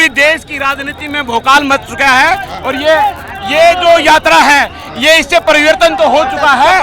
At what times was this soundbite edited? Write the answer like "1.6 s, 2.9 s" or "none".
none

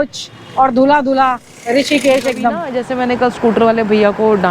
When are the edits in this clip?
2.7 s

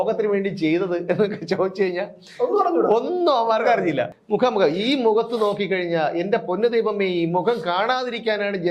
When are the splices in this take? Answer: 4.2 s

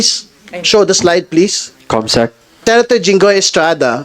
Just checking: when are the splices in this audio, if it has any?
2.5 s

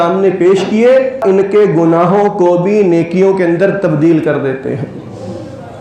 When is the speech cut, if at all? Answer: 1.2 s

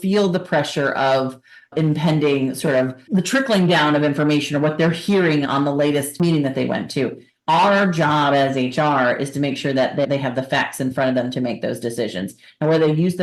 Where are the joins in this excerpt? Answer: 6.2 s

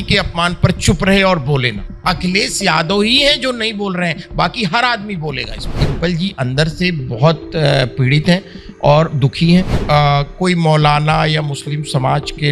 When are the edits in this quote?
1.9 s, 5.8 s, 9.8 s

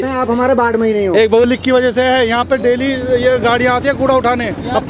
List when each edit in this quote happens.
1.4 s

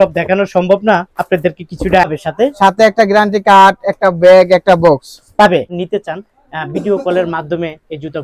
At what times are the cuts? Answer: 2.1 s, 5.7 s

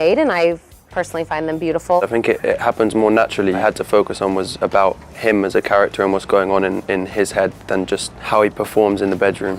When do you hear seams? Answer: 2.1 s, 3.6 s, 8.1 s

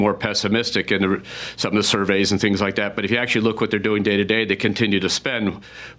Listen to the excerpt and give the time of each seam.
none

